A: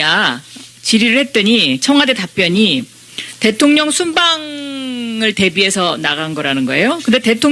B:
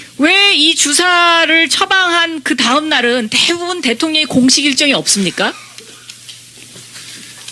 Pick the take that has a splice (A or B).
A